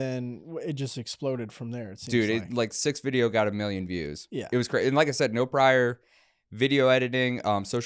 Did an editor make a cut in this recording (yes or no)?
no